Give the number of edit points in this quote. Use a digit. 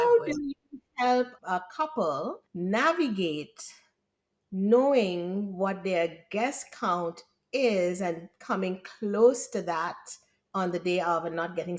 2